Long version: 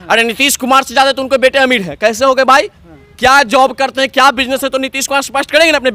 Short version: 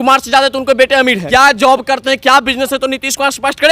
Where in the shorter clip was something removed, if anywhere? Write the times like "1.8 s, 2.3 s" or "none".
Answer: 1.2 s

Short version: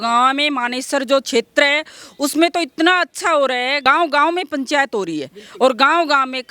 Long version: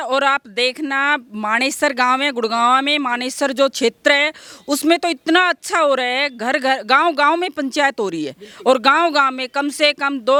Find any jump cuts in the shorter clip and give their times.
3.8 s

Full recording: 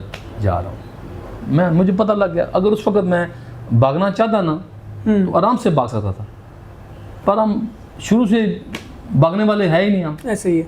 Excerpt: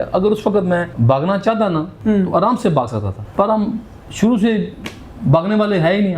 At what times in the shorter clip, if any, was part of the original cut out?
0.9 s, 1.9 s, 3.2 s

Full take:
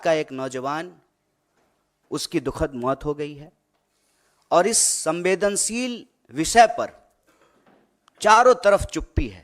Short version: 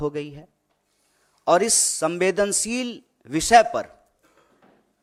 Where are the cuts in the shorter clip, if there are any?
none

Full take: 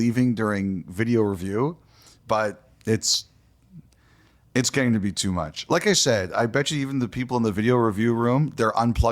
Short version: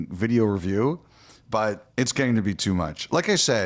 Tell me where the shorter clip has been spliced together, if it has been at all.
1.8 s

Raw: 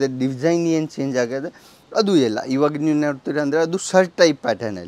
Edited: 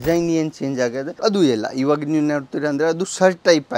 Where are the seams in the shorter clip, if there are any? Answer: 1.1 s

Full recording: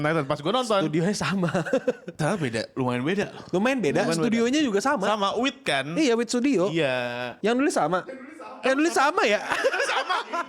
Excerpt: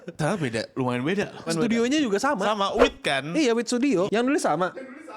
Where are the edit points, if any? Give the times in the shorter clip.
1.5 s, 4.1 s

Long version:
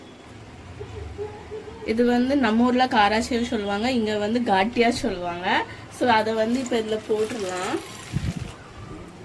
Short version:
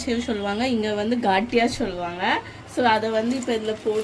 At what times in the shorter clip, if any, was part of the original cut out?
none

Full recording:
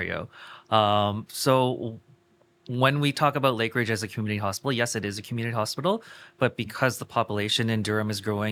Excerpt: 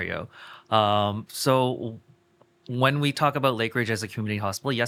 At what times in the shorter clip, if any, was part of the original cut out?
none

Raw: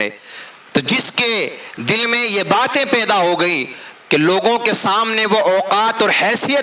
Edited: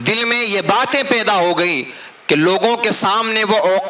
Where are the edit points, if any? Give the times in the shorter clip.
none

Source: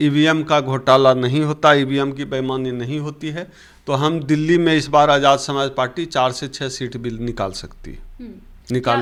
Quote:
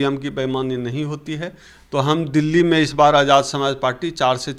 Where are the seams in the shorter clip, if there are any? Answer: none

